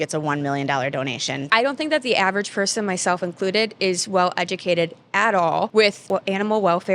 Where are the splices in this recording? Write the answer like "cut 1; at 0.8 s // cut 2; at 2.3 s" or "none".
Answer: cut 1; at 1.3 s // cut 2; at 6.0 s